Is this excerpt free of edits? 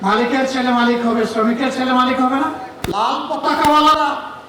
no; 1 cut; at 2.7 s

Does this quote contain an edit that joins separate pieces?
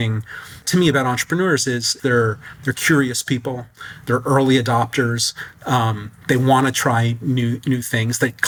no; 0 cuts

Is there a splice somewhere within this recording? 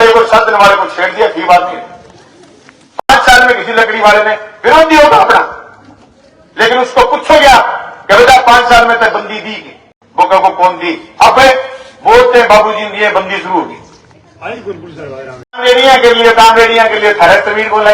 yes; 1 cut; at 15.6 s

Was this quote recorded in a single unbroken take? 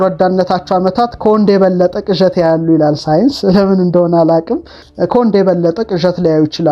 yes; 0 cuts

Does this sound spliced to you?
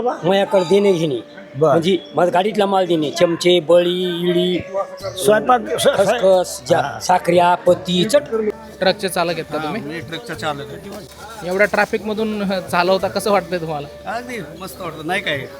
yes; 2 cuts; at 8.5 s, 11.1 s

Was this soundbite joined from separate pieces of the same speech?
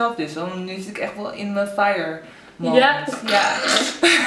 no; 0 cuts

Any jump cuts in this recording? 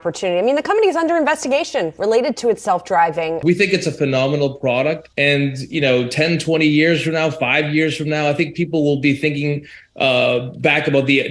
yes; 2 cuts; at 3.4 s, 5.1 s

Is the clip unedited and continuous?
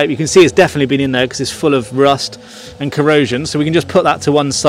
yes; 0 cuts

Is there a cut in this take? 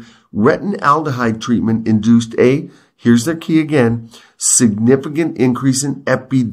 no; 0 cuts

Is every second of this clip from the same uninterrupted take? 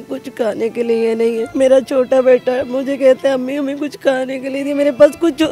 no; 1 cut; at 1.5 s

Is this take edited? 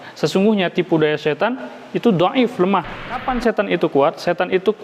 yes; 1 cut; at 3.2 s

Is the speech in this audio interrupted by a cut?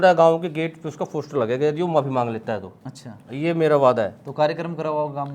no; 0 cuts

